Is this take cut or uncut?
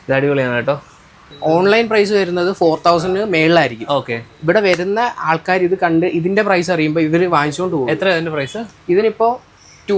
cut